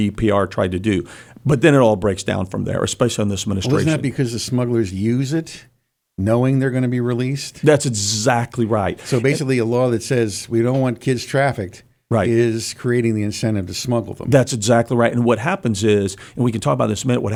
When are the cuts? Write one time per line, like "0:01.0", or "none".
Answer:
none